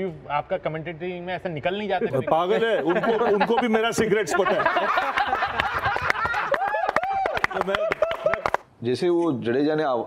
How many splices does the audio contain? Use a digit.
1